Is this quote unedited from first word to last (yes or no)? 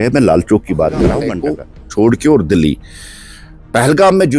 no